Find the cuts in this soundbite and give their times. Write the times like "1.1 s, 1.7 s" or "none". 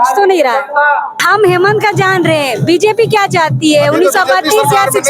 1.1 s